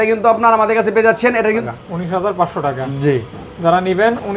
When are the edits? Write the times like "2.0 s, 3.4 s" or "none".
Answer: 1.6 s